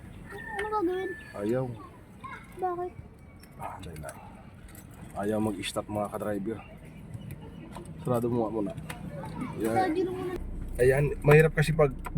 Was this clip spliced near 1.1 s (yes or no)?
no